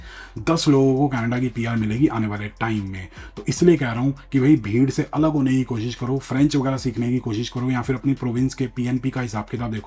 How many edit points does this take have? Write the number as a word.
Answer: zero